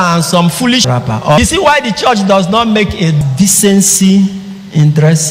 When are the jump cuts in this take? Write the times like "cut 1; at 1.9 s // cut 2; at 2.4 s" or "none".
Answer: cut 1; at 0.9 s // cut 2; at 3.2 s